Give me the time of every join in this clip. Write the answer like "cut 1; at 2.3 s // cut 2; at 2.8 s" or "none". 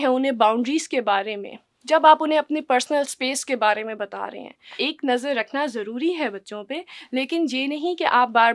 cut 1; at 4.8 s